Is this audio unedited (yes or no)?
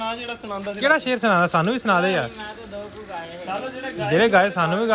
yes